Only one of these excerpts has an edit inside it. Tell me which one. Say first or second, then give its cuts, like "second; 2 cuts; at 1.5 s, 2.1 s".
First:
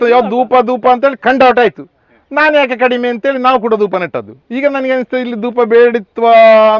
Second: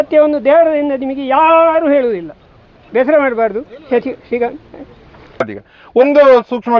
second; 1 cut; at 5.4 s